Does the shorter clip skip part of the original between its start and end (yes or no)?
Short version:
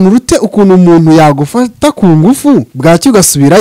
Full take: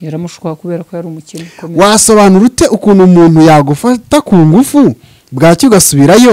yes